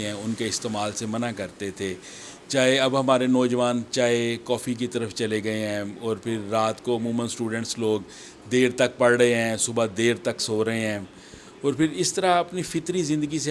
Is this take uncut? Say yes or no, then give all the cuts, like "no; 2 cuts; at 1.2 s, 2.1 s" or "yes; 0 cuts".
yes; 0 cuts